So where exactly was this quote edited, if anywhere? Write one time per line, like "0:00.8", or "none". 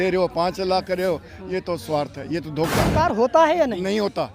0:02.9